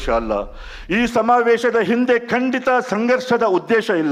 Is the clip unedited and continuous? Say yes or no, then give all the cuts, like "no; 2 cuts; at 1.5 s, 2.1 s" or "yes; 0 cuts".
yes; 0 cuts